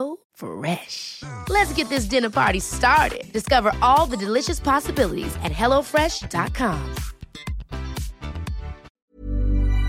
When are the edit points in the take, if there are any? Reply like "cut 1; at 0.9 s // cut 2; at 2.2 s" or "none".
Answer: cut 1; at 8.8 s